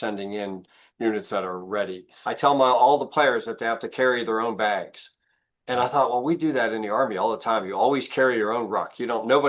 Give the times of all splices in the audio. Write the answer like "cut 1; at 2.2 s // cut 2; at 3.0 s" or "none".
cut 1; at 2.1 s